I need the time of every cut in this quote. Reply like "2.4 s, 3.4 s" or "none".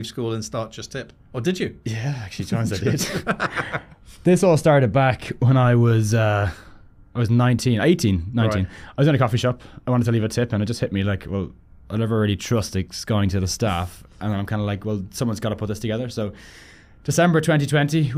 none

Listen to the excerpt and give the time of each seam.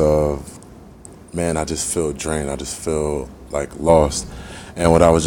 none

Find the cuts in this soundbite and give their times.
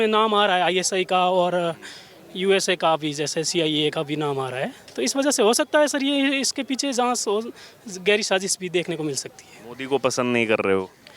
none

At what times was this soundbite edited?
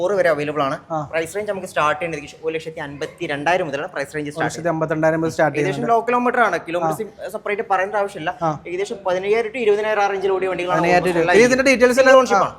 none

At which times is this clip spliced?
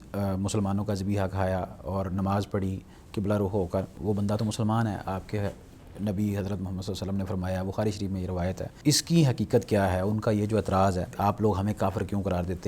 4.0 s, 8.8 s, 11.2 s

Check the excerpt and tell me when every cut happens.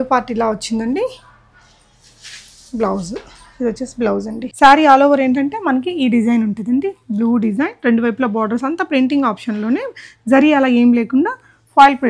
4.4 s

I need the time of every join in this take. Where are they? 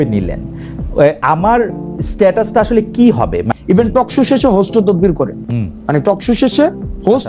3.5 s

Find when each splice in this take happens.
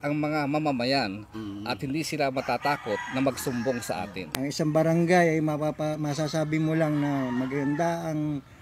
4.2 s

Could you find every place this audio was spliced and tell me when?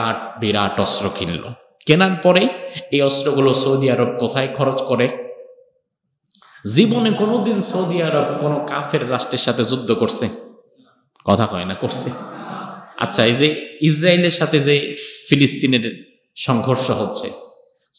none

